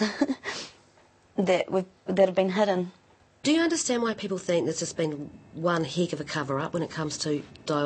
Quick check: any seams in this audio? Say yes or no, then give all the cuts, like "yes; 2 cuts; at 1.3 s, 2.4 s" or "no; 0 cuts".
yes; 1 cut; at 3.0 s